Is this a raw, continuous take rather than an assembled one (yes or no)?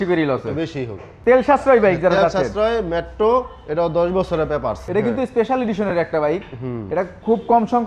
no